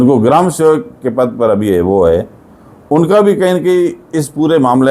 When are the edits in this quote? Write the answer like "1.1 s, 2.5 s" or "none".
none